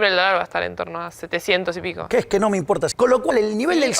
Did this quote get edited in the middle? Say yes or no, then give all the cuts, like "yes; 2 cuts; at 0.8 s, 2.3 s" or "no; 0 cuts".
yes; 1 cut; at 2.9 s